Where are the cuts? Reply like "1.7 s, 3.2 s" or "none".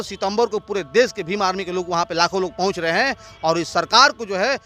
none